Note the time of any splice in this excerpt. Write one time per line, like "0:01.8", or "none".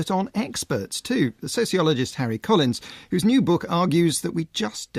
none